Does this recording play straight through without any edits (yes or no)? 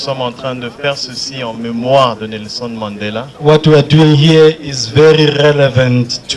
yes